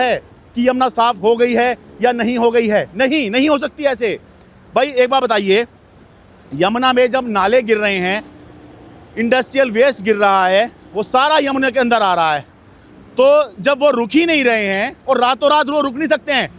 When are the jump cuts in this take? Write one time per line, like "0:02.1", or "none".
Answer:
none